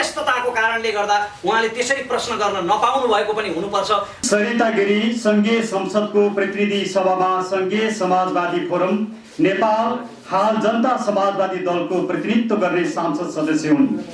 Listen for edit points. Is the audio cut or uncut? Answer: cut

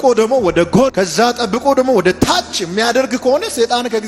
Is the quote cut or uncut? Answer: cut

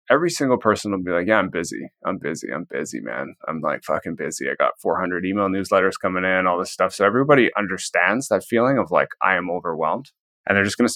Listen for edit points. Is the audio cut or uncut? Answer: uncut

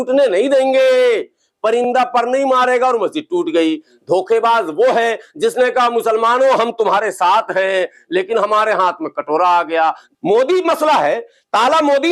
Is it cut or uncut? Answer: cut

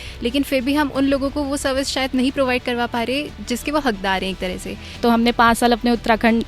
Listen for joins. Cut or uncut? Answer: cut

